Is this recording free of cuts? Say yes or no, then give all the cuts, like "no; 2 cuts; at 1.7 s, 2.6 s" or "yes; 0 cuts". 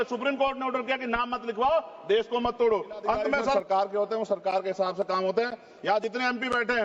no; 1 cut; at 3.5 s